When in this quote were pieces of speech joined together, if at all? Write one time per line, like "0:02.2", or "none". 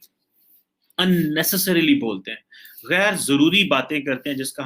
none